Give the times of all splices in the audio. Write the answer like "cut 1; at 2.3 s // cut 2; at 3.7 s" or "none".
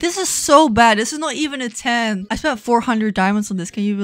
none